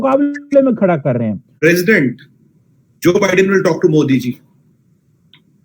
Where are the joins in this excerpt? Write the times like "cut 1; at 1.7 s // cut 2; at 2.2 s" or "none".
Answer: cut 1; at 1.4 s